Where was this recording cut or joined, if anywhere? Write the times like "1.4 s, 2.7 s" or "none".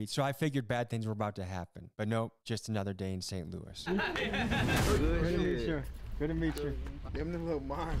none